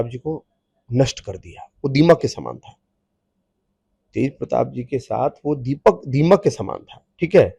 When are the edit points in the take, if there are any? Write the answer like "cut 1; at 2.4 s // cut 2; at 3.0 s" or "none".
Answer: none